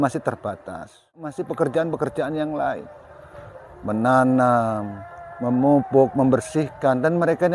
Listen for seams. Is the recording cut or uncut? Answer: cut